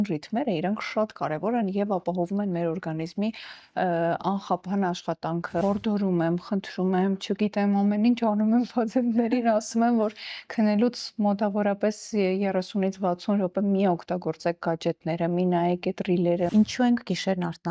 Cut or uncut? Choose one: cut